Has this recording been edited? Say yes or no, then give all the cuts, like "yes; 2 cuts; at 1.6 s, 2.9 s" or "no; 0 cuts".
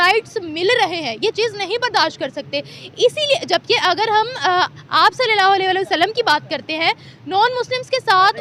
no; 0 cuts